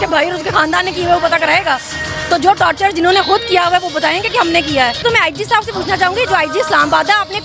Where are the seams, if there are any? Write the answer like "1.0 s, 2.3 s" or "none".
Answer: 5.0 s